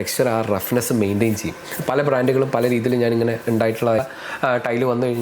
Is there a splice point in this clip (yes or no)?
yes